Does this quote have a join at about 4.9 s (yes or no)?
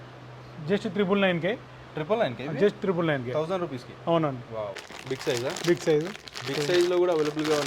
yes